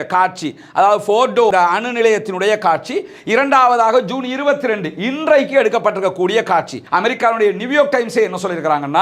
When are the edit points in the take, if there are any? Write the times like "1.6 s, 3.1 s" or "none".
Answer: 6.8 s